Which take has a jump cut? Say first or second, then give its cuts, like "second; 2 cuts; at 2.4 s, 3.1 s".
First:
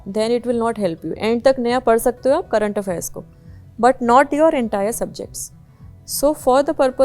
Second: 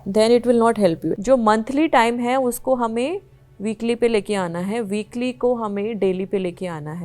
second; 1 cut; at 1.1 s